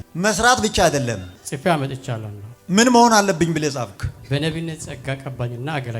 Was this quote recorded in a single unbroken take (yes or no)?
no